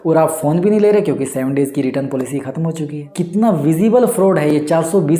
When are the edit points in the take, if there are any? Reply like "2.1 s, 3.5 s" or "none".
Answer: 3.0 s